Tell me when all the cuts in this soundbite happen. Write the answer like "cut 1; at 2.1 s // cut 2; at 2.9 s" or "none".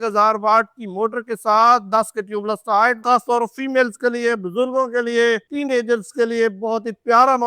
cut 1; at 3.0 s